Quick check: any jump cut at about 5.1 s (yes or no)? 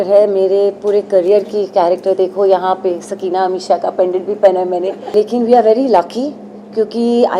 yes